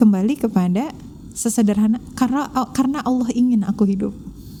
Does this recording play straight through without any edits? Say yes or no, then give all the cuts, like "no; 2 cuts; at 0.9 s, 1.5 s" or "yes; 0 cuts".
yes; 0 cuts